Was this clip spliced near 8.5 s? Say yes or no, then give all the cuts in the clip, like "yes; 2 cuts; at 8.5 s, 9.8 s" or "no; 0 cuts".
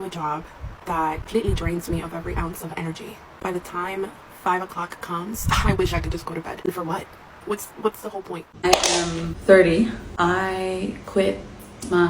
yes; 1 cut; at 8.5 s